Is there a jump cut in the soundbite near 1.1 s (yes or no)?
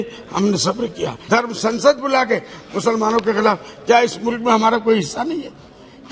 yes